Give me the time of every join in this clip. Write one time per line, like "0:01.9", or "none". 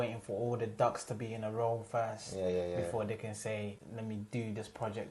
0:03.8